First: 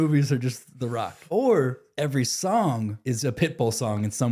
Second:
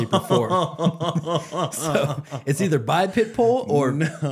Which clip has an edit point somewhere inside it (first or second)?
first